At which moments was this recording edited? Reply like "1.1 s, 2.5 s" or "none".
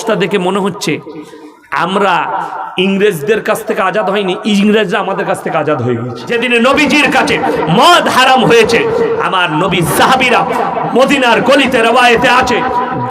6.3 s